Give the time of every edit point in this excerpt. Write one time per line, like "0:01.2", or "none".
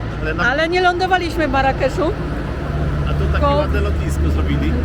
none